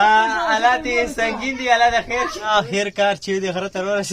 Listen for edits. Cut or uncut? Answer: cut